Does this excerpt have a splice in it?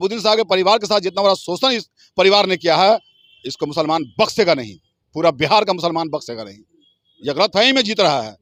no; 0 cuts

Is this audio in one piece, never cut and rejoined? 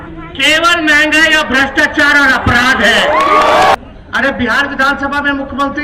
no; 1 cut; at 3.7 s

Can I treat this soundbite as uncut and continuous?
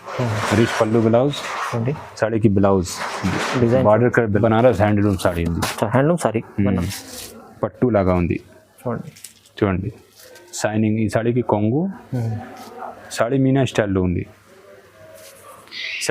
no; 1 cut; at 4.4 s

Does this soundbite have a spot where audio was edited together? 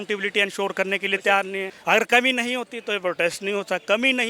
yes; 1 cut; at 1.7 s

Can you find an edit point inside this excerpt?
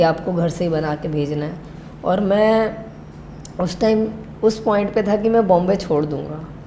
no; 0 cuts

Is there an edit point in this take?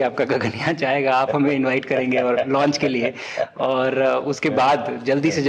no; 0 cuts

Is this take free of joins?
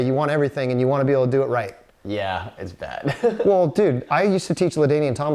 yes; 0 cuts

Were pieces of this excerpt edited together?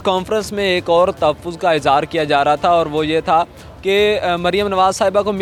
no; 0 cuts

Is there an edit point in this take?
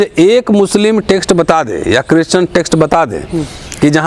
no; 0 cuts

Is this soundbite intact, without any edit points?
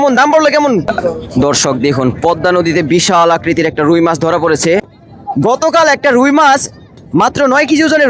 no; 2 cuts; at 0.9 s, 4.9 s

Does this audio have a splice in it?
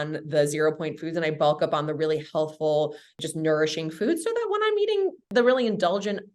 yes; 1 cut; at 3.2 s

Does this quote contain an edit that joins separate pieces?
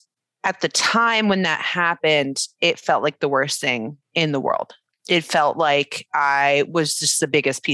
yes; 1 cut; at 4.8 s

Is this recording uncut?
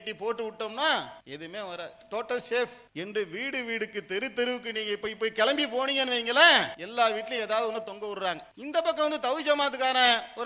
no; 4 cuts; at 1.2 s, 2.8 s, 6.8 s, 8.5 s

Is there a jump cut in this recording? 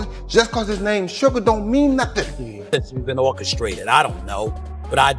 yes; 1 cut; at 2.6 s

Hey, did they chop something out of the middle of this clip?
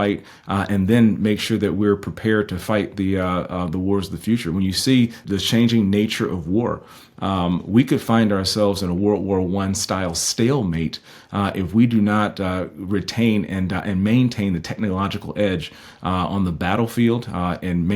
yes; 1 cut; at 5.2 s

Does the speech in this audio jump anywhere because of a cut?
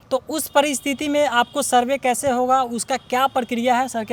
no; 0 cuts

